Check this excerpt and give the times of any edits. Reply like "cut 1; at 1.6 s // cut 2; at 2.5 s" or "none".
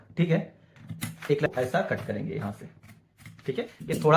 cut 1; at 1.5 s

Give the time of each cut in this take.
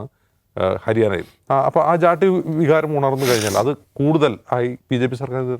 cut 1; at 1.3 s

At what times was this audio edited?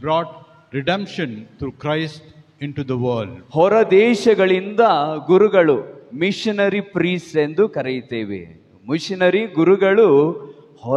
cut 1; at 3.4 s

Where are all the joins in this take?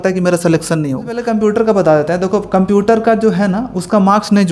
cut 1; at 1.2 s

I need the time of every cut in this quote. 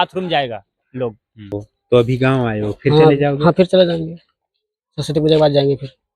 cut 1; at 1.3 s

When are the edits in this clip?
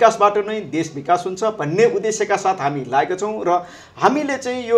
none

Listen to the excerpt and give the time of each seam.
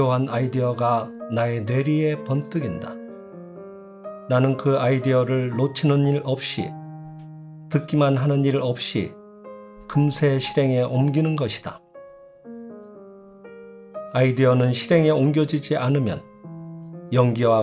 cut 1; at 2.7 s // cut 2; at 4.0 s

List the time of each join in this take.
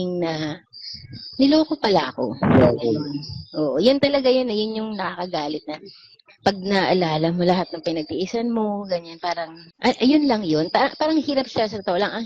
cut 1; at 9.6 s

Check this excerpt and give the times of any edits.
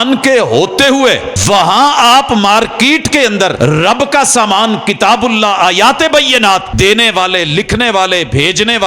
cut 1; at 1.3 s // cut 2; at 3.5 s // cut 3; at 6.7 s

